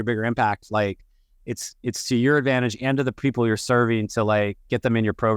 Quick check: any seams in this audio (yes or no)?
no